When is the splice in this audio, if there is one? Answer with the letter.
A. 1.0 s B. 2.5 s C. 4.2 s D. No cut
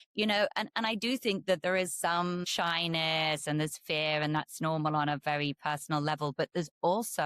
B